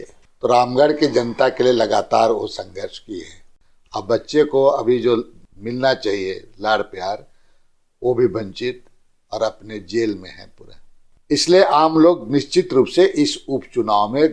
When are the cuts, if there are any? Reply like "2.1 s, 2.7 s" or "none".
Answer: 3.6 s, 11.1 s

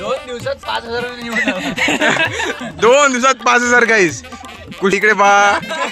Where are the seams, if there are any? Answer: 4.9 s

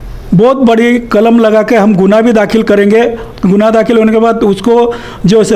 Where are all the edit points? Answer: 3.3 s

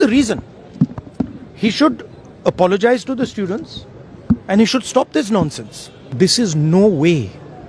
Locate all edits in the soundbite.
6.0 s

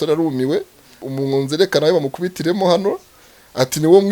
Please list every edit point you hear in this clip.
1.0 s

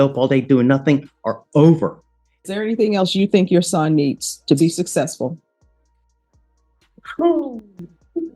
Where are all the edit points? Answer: 2.5 s

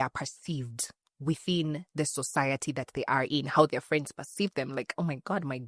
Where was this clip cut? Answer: none

